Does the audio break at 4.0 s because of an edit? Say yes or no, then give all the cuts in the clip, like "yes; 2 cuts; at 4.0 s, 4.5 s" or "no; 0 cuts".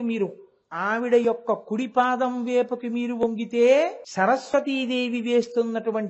yes; 1 cut; at 4.0 s